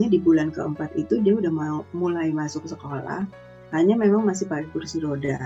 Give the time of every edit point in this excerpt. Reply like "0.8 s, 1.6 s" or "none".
none